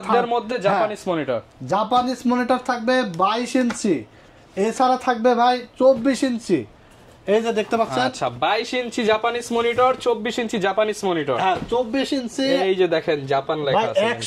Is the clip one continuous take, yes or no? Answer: yes